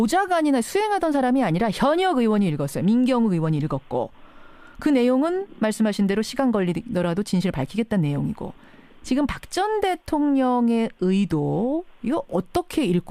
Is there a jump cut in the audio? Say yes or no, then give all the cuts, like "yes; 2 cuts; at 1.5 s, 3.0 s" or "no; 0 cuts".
no; 0 cuts